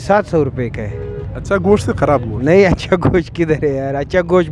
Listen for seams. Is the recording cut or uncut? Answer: uncut